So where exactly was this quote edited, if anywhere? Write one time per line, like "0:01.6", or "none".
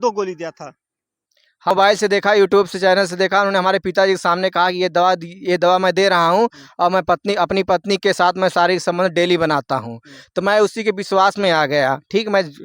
0:01.7